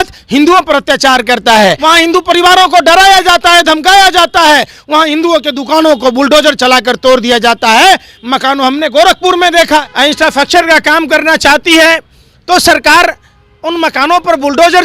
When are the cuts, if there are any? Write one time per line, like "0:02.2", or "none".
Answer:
0:01.8
0:09.9